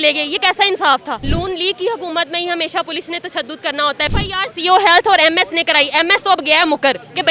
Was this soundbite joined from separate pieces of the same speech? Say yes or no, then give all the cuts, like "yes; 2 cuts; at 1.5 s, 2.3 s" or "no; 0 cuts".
yes; 2 cuts; at 1.2 s, 4.1 s